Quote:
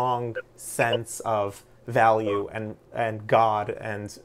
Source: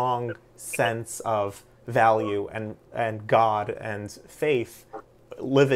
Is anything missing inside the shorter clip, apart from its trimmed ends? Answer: no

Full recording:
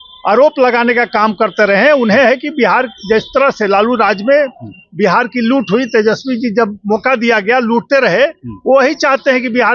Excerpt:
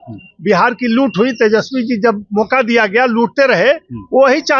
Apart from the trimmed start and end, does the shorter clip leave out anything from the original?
no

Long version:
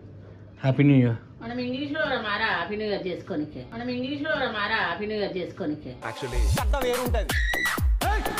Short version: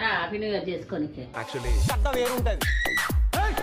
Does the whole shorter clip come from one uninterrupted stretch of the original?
no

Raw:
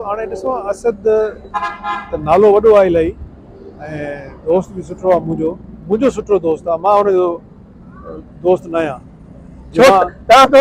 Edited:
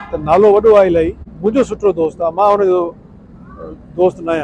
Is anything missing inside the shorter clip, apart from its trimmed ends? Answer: yes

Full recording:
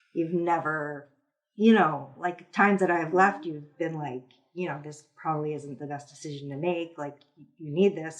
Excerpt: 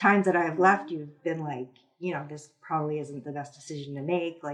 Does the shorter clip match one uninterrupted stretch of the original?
yes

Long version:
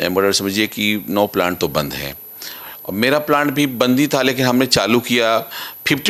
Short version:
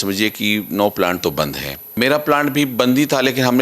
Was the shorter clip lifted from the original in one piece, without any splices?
no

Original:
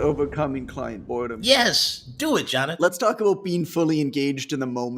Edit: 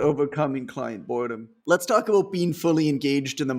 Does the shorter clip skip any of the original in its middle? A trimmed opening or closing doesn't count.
yes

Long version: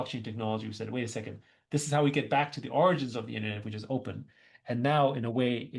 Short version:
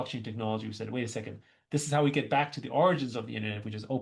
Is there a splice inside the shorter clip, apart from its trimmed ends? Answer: no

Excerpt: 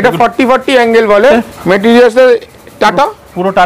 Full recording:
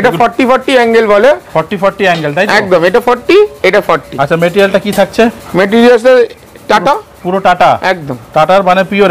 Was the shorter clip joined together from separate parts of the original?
yes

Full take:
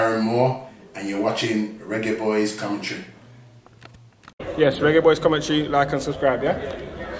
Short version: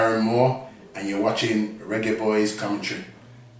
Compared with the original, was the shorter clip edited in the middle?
no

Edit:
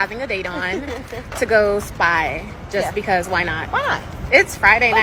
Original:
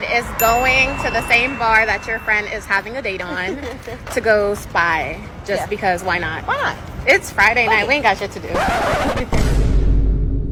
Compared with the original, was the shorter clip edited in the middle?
no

